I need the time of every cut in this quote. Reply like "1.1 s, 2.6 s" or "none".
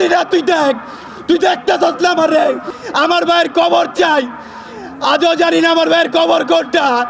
2.7 s